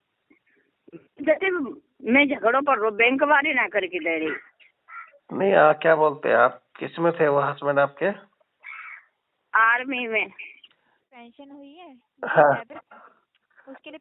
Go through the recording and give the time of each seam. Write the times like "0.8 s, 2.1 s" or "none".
11.0 s